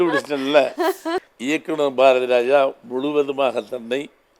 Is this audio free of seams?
no; 1 cut; at 1.2 s

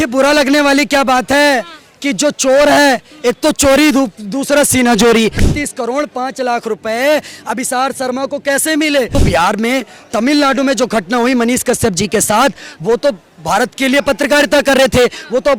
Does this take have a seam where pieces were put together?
yes; 2 cuts; at 5.4 s, 9.1 s

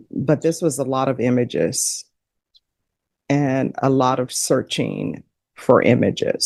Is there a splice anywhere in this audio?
no; 0 cuts

